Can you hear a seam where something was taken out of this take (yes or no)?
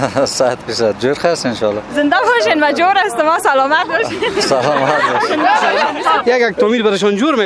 yes